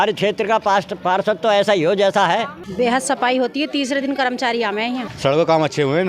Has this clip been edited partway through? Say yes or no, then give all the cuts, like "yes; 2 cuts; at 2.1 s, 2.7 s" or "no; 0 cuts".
yes; 2 cuts; at 2.6 s, 5.1 s